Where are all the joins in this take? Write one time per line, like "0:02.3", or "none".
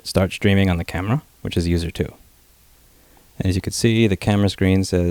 none